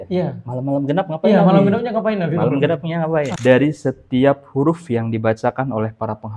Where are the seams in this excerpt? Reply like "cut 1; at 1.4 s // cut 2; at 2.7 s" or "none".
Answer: cut 1; at 3.3 s